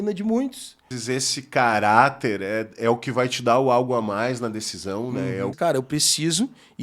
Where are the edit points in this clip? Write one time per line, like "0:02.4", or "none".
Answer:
0:00.9
0:05.5